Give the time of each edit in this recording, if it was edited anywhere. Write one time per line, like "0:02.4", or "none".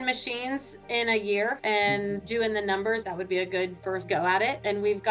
none

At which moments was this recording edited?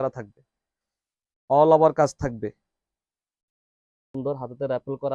0:04.1

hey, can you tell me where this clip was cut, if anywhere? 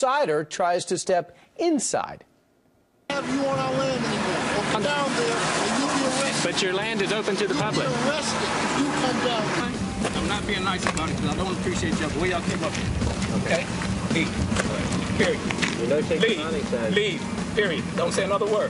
0:09.4

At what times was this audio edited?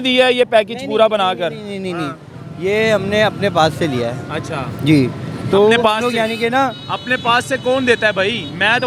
none

